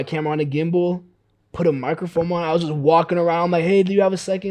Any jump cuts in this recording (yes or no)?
no